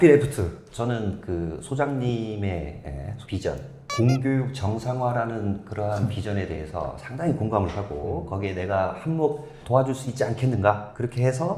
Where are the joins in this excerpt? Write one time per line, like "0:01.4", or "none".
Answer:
none

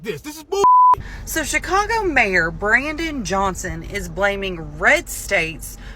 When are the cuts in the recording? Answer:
0:01.0

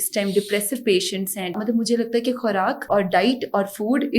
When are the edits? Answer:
0:01.5
0:02.8

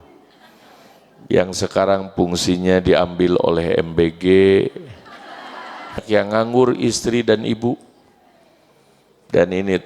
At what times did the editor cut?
0:06.0

